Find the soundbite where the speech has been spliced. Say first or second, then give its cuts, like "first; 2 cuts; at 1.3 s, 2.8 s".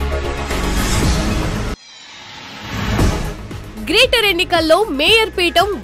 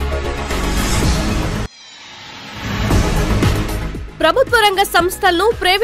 first; 2 cuts; at 1.6 s, 2.9 s